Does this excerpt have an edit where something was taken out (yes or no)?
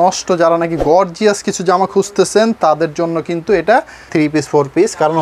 yes